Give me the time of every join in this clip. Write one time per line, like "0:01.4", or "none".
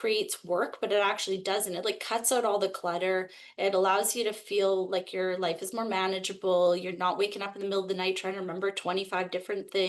none